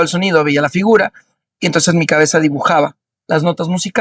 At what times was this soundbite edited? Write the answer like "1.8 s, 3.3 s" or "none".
none